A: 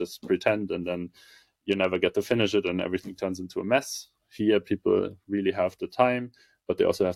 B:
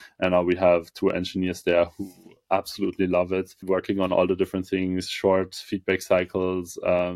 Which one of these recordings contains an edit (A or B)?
B